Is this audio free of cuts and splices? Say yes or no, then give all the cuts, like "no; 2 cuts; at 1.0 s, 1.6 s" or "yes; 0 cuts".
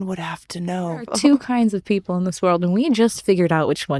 no; 1 cut; at 1.1 s